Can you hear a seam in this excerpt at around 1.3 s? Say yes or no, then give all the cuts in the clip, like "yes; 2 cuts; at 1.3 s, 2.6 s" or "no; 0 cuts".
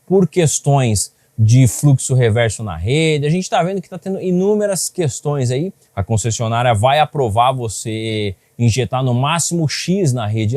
no; 1 cut; at 5.9 s